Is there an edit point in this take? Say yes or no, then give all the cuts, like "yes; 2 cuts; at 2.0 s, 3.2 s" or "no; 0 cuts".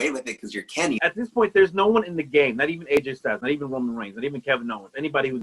yes; 1 cut; at 1.0 s